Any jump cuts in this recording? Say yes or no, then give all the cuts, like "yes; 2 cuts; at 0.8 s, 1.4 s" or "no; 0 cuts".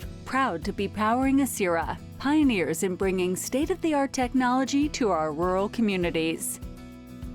yes; 1 cut; at 6.4 s